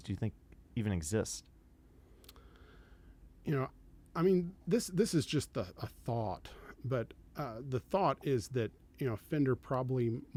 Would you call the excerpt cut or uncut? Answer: uncut